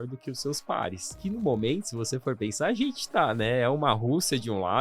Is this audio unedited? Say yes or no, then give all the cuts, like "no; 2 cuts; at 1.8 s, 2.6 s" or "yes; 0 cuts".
no; 1 cut; at 1.1 s